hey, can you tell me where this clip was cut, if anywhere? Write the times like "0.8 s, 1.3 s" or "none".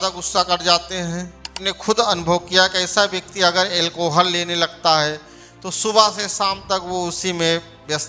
1.5 s